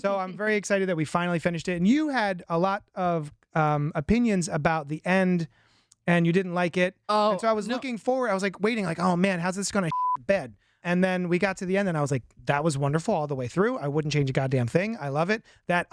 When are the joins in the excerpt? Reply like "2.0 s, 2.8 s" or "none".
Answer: 10.8 s